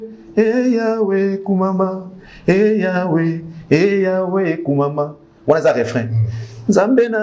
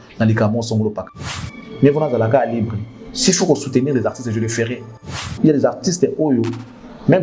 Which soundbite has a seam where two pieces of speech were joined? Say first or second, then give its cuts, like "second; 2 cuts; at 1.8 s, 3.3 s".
second; 2 cuts; at 1.4 s, 5.2 s